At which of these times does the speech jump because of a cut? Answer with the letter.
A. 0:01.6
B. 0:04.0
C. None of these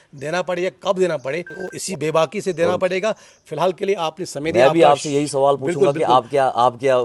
A